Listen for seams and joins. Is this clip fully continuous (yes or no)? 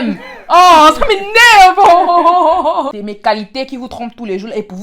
no